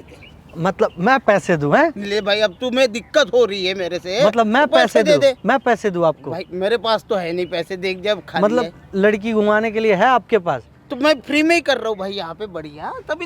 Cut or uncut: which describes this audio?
uncut